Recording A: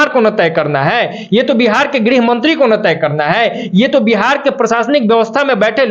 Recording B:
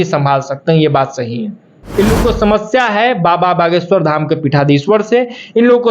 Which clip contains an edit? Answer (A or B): B